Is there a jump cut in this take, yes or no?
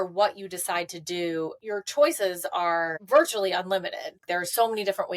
yes